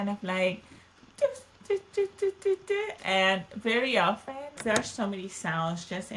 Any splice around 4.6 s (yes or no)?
yes